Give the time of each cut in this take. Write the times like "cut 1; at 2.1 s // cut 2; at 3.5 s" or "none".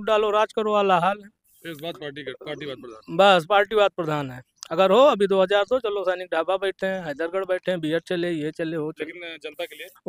none